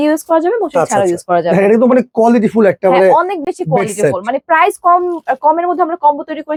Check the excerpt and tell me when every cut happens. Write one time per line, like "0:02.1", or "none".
none